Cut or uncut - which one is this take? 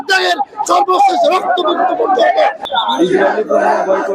cut